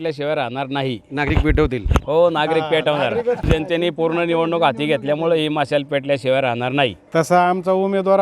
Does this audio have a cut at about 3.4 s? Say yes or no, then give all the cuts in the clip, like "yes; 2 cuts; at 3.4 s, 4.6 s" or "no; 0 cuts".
yes; 2 cuts; at 3.4 s, 7.0 s